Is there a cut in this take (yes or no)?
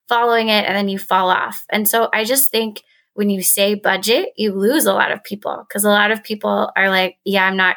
no